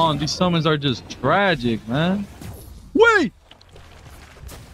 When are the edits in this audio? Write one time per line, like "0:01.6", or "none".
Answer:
none